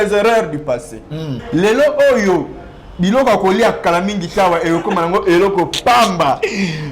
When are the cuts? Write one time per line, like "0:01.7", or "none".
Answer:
0:01.4